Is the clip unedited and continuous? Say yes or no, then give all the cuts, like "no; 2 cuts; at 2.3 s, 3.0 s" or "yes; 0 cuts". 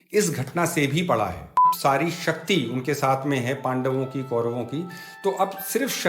no; 1 cut; at 1.7 s